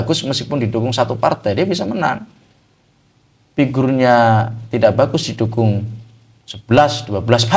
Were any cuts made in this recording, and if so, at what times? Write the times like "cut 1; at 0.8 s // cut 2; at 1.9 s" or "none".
none